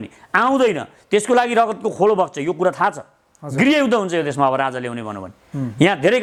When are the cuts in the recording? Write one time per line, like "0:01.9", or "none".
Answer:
none